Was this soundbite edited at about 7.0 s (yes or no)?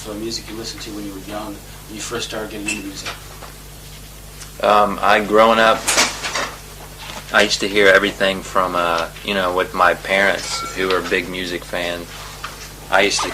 yes